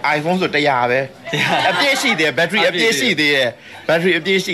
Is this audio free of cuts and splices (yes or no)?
yes